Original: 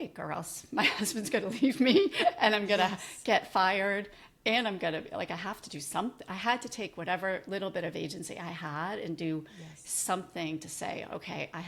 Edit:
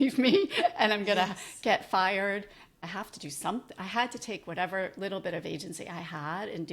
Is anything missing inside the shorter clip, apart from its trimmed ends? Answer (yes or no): yes